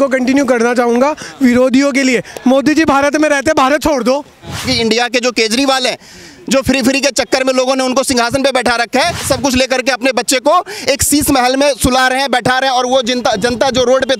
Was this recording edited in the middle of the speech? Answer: yes; 2 cuts; at 4.7 s, 9.2 s

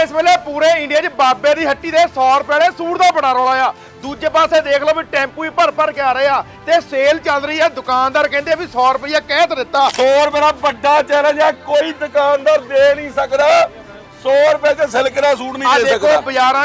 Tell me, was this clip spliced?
yes; 1 cut; at 9.9 s

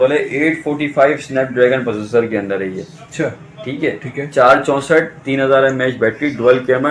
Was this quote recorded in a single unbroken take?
yes; 0 cuts

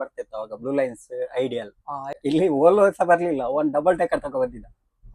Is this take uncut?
no; 1 cut; at 2.1 s

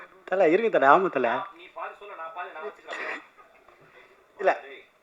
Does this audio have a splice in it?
no; 0 cuts

